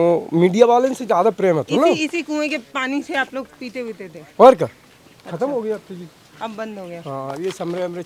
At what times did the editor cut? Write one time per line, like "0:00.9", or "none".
none